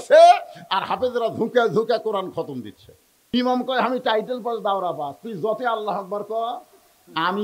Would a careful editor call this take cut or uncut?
cut